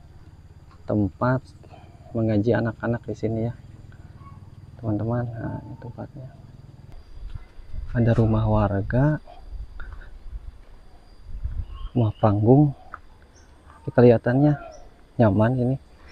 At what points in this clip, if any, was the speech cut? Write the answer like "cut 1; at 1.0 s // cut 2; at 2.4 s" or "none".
cut 1; at 6.9 s

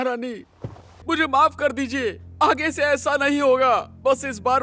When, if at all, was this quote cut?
cut 1; at 1.0 s

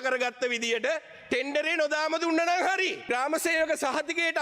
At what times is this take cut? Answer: cut 1; at 3.0 s

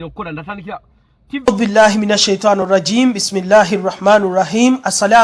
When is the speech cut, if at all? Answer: cut 1; at 1.4 s

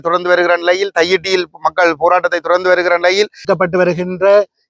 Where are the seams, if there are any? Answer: cut 1; at 3.5 s

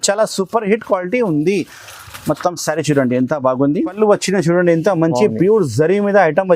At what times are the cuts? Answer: cut 1; at 3.9 s

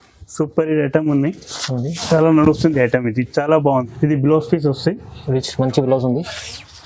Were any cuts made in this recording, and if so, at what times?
cut 1; at 3.9 s

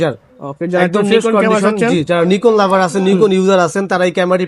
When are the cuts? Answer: none

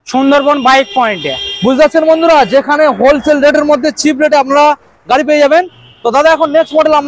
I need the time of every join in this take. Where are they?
none

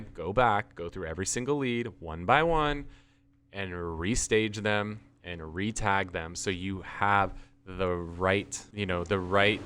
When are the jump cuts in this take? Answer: cut 1; at 8.6 s

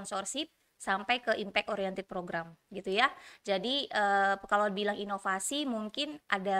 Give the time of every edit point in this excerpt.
none

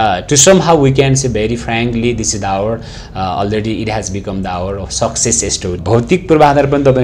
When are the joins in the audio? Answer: cut 1; at 5.8 s

